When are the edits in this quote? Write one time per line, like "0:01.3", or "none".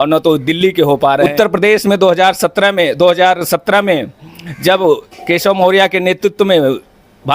0:01.3